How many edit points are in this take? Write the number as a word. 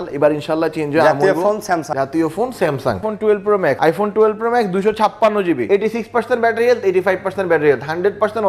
four